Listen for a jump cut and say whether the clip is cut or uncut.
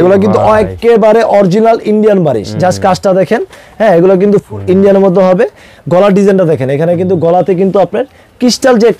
uncut